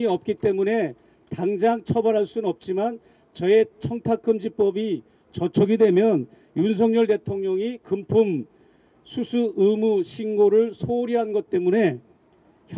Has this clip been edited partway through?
no; 0 cuts

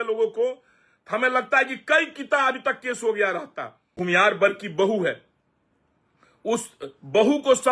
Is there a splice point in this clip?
yes; 1 cut; at 3.9 s

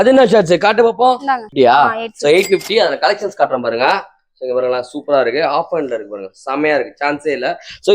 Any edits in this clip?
yes; 1 cut; at 1.5 s

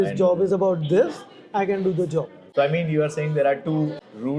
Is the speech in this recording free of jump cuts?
no; 1 cut; at 2.4 s

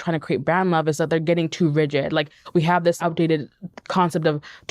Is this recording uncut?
no; 1 cut; at 3.0 s

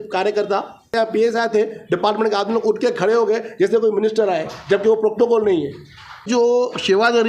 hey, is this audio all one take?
no; 2 cuts; at 0.9 s, 6.3 s

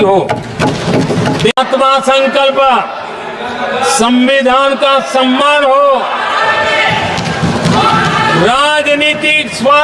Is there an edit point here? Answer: yes; 1 cut; at 1.5 s

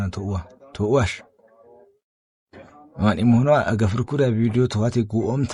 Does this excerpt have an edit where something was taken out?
no; 0 cuts

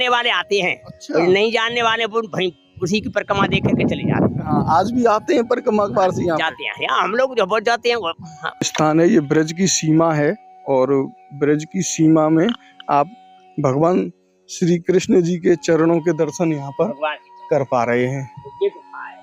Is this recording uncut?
no; 1 cut; at 8.7 s

